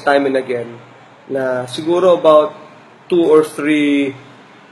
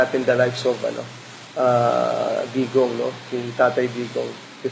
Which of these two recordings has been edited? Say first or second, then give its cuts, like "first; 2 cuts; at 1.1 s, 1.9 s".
first; 1 cut; at 1.9 s